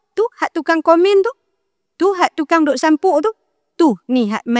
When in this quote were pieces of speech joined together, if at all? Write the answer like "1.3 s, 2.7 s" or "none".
none

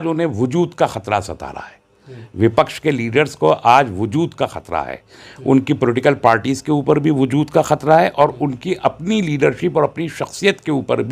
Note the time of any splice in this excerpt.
none

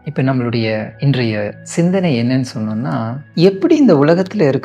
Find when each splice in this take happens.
1.2 s, 3.2 s

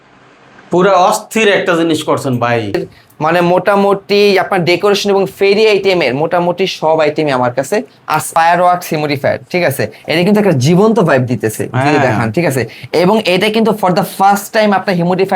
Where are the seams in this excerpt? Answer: 2.9 s, 8.3 s

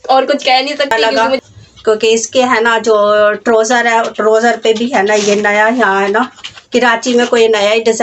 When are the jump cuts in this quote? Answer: 0.9 s

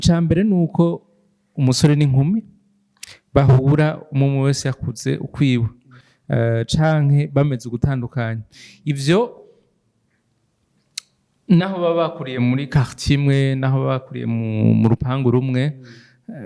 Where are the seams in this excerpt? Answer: none

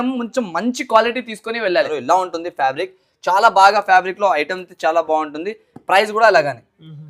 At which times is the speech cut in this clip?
1.9 s

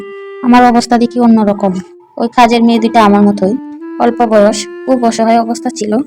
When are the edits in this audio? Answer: 1.8 s

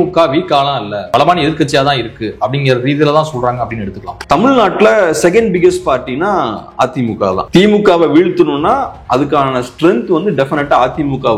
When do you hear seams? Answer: 1.0 s, 4.2 s

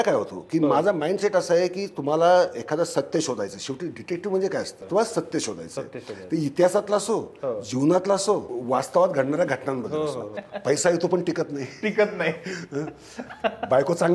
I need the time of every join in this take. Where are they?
4.8 s, 8.5 s, 10.4 s

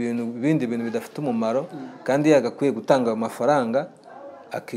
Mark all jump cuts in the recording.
none

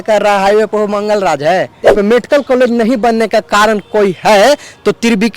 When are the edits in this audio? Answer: 1.9 s

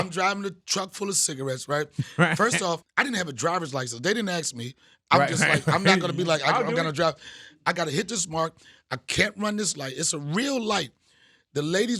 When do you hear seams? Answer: 2.9 s

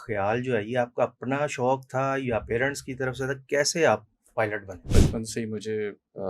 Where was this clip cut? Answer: 4.9 s

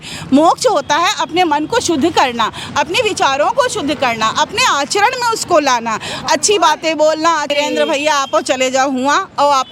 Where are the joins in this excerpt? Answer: 7.5 s

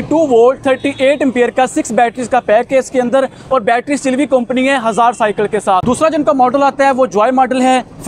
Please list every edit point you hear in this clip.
5.8 s

